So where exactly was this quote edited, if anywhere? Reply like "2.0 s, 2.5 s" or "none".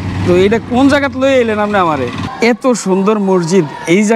2.2 s